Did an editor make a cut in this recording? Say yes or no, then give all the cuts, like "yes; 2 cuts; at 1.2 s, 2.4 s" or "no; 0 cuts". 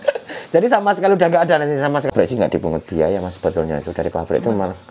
yes; 1 cut; at 2.1 s